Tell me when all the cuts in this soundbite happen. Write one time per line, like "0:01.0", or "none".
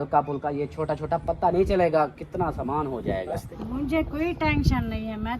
0:03.4